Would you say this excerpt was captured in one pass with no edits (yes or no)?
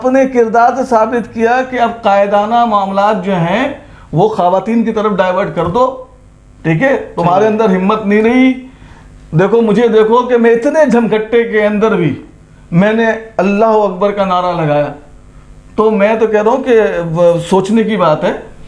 yes